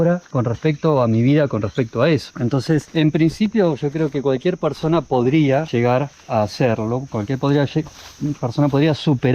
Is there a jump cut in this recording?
no; 0 cuts

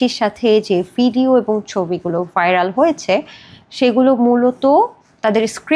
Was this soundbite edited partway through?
no; 0 cuts

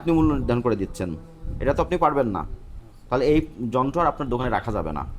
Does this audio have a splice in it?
no; 0 cuts

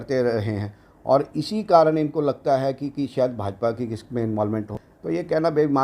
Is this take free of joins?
no; 1 cut; at 4.7 s

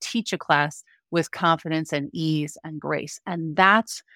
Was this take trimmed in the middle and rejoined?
no; 0 cuts

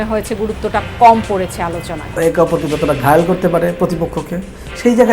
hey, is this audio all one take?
no; 1 cut; at 2.1 s

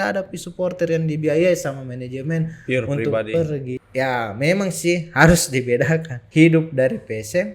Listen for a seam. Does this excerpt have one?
yes; 2 cuts; at 3.7 s, 6.2 s

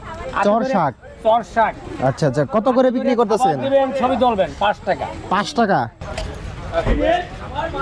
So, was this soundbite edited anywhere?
yes; 1 cut; at 6.0 s

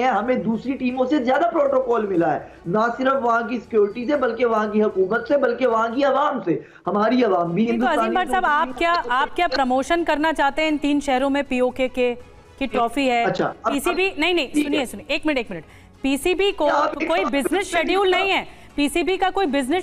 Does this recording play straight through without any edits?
yes; 0 cuts

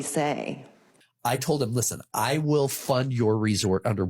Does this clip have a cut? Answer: yes; 1 cut; at 1.0 s

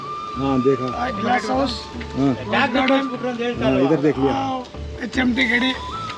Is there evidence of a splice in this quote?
no; 0 cuts

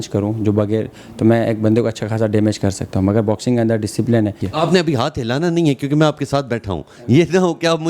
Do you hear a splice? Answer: yes; 1 cut; at 4.5 s

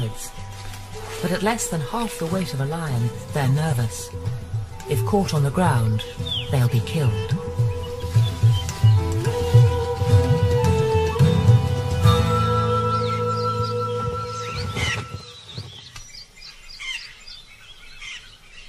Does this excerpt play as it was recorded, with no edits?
yes; 0 cuts

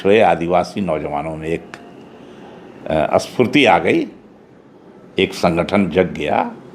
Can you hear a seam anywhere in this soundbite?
no; 0 cuts

